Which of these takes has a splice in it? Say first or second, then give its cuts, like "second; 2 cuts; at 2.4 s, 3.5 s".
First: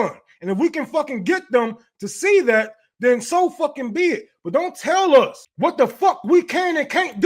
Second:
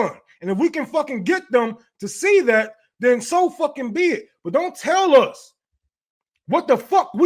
first; 1 cut; at 5.4 s